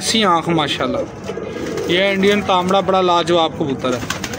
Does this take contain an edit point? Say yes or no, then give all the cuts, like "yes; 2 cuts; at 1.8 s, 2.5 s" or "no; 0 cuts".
no; 0 cuts